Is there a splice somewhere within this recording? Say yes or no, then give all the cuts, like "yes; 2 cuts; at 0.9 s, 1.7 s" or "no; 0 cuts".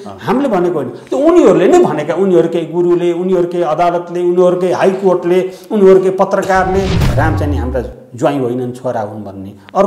yes; 1 cut; at 7.0 s